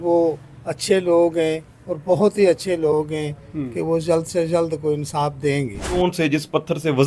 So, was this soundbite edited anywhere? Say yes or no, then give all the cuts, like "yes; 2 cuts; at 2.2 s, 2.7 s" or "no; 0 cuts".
yes; 1 cut; at 6.0 s